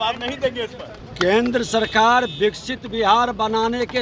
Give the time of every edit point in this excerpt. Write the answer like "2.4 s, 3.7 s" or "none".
1.0 s